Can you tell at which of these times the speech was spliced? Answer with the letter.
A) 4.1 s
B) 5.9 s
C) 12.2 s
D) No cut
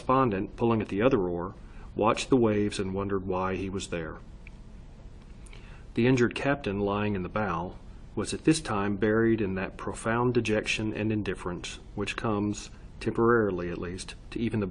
A